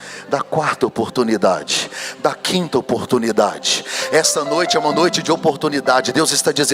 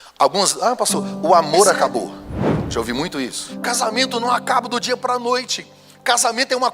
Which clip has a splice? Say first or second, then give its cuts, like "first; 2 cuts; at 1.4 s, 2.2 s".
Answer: second; 1 cut; at 3.4 s